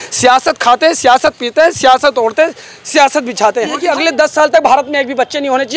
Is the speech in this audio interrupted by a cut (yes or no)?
yes